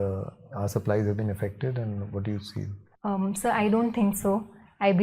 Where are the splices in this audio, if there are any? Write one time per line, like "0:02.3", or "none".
0:02.8